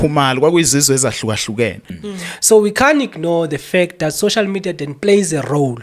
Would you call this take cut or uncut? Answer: cut